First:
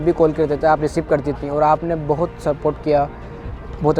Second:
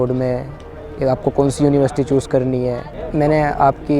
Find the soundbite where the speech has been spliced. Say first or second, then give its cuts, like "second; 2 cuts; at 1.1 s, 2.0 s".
second; 1 cut; at 2.9 s